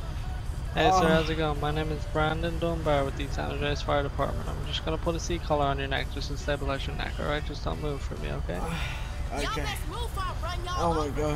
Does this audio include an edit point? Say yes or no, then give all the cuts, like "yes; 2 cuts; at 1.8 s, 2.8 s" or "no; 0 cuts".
no; 0 cuts